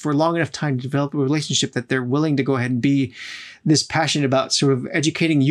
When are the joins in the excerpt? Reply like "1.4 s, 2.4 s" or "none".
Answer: none